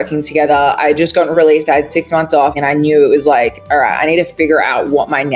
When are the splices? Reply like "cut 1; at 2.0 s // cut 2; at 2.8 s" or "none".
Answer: cut 1; at 2.5 s

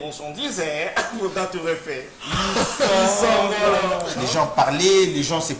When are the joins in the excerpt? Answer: cut 1; at 4.1 s

